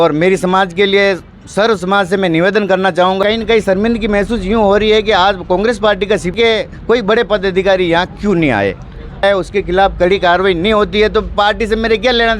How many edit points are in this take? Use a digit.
3